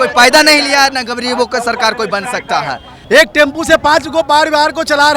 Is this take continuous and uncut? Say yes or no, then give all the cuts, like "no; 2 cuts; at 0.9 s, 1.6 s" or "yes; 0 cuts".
no; 1 cut; at 2.9 s